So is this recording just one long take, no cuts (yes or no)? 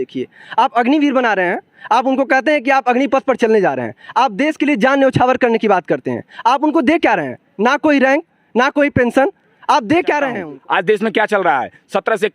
no